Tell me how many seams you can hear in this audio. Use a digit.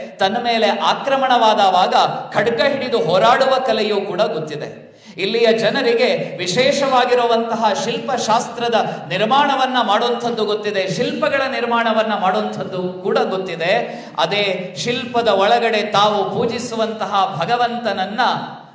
0